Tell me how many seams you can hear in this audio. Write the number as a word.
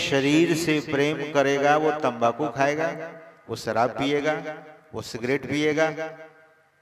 zero